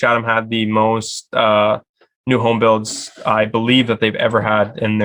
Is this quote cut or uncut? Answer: uncut